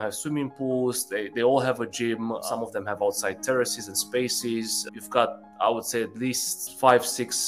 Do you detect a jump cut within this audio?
no; 0 cuts

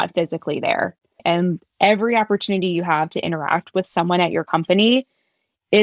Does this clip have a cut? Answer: yes; 1 cut; at 1.1 s

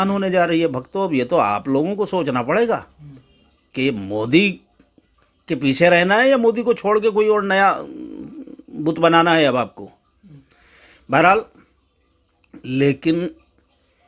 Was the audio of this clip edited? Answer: no; 0 cuts

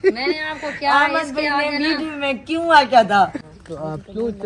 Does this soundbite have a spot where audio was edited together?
yes; 1 cut; at 3.4 s

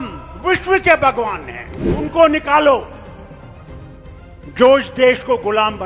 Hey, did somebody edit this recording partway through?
yes; 3 cuts; at 2.0 s, 3.0 s, 4.5 s

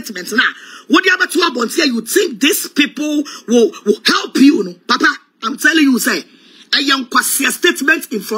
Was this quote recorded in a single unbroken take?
yes; 0 cuts

